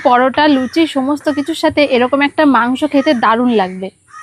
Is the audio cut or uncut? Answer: uncut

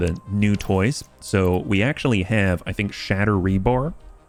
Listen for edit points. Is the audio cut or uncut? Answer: uncut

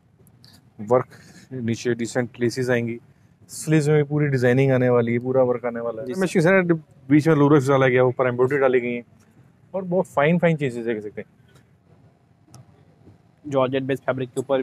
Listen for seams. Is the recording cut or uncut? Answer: cut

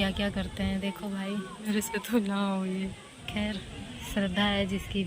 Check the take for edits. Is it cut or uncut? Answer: cut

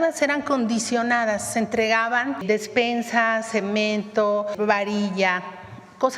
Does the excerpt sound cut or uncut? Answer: cut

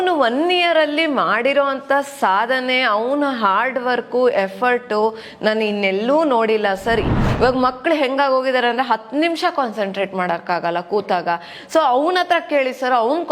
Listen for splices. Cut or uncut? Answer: cut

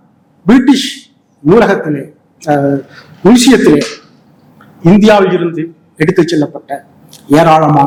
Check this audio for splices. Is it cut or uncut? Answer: uncut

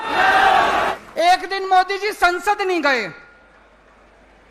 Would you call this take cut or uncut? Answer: cut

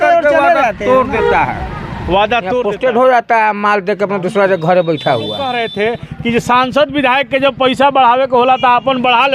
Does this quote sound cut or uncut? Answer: cut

